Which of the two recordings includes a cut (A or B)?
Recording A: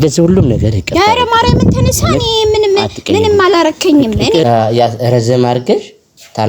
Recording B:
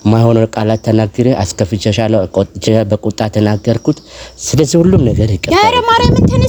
A